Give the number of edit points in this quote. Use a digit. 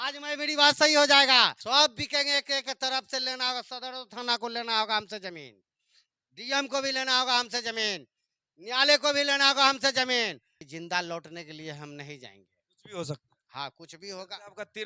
2